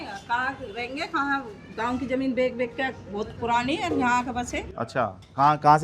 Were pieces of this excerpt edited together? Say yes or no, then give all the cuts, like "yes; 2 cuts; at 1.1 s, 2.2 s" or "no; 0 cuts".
no; 0 cuts